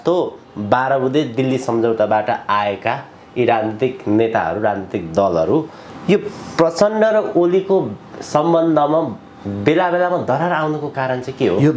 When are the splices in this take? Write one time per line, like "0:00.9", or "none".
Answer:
none